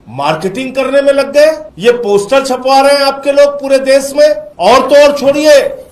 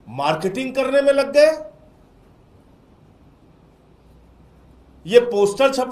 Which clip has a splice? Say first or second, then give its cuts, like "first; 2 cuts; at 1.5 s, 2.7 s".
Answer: first; 2 cuts; at 1.7 s, 4.5 s